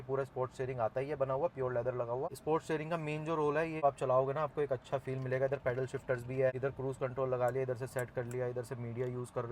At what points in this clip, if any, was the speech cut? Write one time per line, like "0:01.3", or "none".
0:03.8
0:06.6